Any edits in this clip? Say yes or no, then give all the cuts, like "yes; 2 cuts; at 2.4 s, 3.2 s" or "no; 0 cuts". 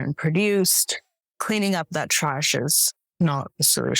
yes; 1 cut; at 1.1 s